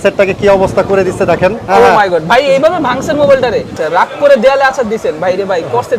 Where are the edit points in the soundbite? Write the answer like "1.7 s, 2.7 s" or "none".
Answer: 1.6 s, 3.7 s